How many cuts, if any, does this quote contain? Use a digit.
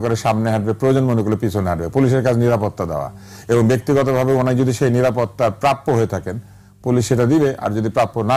0